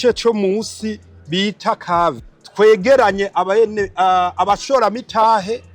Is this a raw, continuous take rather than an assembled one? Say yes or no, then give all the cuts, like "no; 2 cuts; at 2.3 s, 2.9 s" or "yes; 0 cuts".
no; 1 cut; at 2.3 s